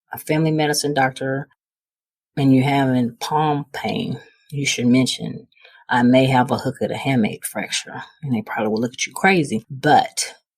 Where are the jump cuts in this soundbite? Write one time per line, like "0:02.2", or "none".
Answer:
0:09.7